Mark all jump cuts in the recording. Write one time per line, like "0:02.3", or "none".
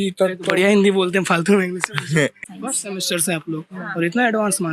0:02.4